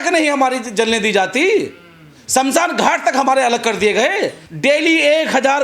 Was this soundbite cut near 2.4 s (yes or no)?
no